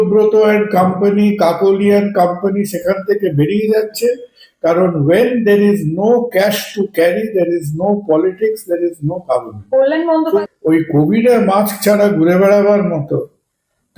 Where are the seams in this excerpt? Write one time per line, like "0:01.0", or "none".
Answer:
0:10.2